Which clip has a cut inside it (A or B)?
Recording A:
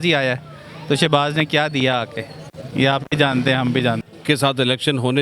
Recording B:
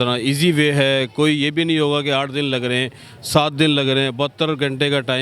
A